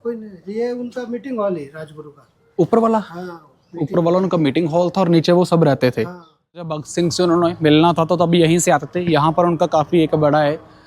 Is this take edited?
yes; 1 cut; at 6.7 s

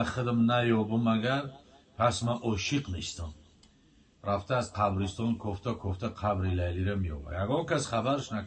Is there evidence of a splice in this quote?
no; 0 cuts

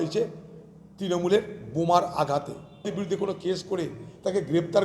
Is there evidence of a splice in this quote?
yes; 1 cut; at 2.9 s

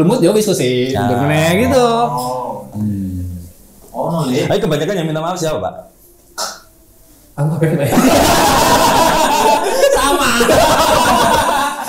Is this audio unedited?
yes; 0 cuts

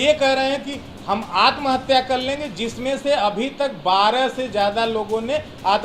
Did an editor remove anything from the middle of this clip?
no; 0 cuts

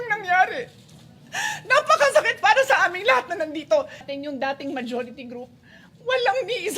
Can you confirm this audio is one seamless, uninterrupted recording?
no; 1 cut; at 4.0 s

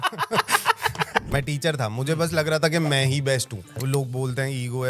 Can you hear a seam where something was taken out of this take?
yes; 2 cuts; at 1.3 s, 3.6 s

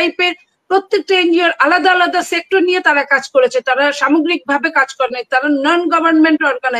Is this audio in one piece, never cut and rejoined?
yes; 0 cuts

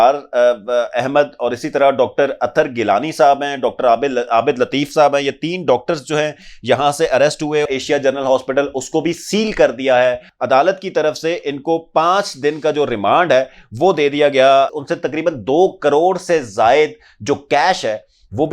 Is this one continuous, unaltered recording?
no; 3 cuts; at 7.7 s, 10.3 s, 14.7 s

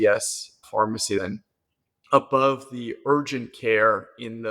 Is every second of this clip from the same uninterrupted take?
no; 1 cut; at 1.2 s

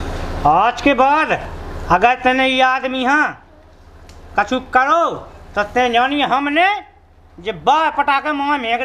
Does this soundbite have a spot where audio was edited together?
no; 0 cuts

